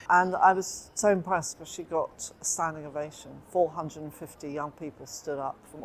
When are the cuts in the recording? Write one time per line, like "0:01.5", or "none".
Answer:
none